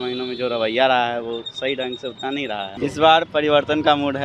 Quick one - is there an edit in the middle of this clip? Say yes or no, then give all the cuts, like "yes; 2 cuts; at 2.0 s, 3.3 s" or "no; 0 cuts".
yes; 1 cut; at 2.7 s